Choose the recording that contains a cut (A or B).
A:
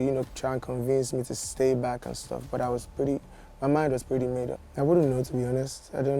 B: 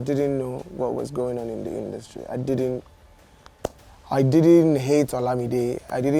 A